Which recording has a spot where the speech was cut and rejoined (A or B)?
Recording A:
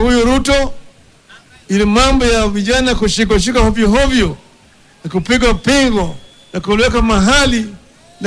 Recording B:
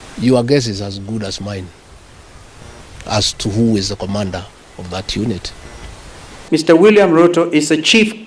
B